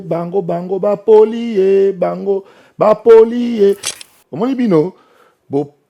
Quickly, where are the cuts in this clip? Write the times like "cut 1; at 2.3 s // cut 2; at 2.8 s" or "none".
cut 1; at 3.9 s